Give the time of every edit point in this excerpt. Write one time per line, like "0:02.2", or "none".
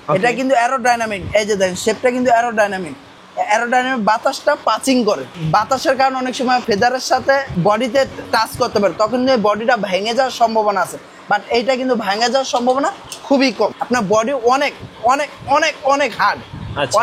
0:05.3
0:06.6
0:07.5
0:13.7